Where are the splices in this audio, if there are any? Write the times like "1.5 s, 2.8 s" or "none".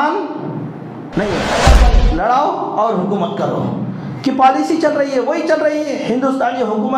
1.8 s